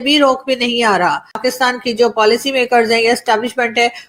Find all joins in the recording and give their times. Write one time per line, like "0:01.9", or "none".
0:01.4

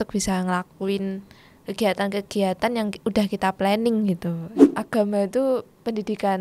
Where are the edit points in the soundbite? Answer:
0:04.6

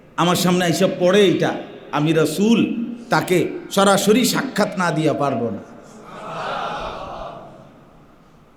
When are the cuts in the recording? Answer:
none

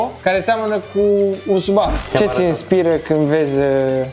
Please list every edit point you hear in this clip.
0:02.0

